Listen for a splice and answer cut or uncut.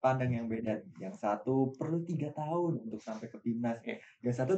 uncut